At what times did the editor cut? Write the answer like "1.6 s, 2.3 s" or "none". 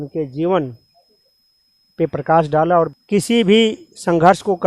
3.0 s